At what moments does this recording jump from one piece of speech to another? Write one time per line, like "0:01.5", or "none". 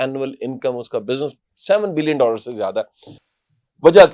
none